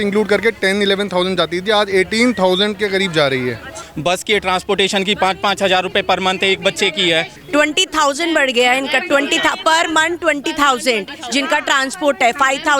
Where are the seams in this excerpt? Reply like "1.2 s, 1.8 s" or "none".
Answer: 3.9 s, 7.4 s